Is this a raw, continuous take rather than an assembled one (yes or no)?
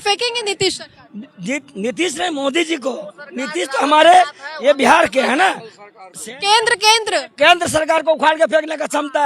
yes